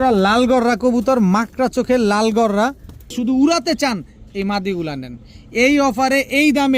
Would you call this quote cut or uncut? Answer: cut